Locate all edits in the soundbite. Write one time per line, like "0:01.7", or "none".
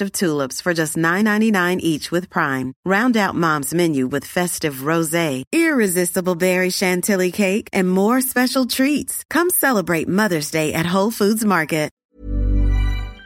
0:12.0